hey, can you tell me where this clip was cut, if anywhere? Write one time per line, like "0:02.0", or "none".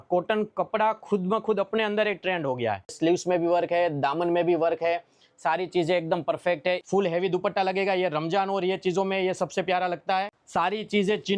0:02.9
0:06.8
0:10.3

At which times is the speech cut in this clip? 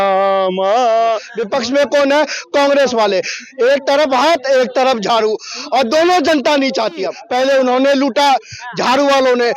0:01.3
0:07.2

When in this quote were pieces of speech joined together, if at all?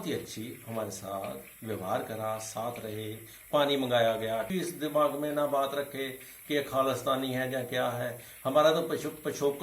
0:04.5

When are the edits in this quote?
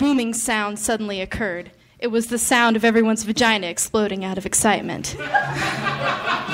none

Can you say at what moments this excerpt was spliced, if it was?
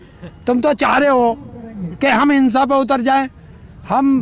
none

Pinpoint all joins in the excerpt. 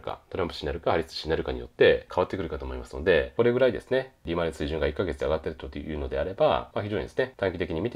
0:02.1
0:03.3
0:06.9

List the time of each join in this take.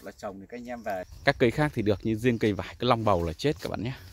0:01.1

